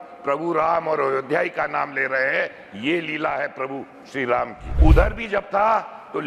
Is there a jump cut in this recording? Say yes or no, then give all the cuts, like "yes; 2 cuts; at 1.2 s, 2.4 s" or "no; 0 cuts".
yes; 1 cut; at 4.6 s